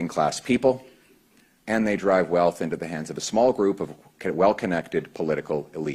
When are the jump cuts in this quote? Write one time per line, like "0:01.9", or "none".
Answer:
none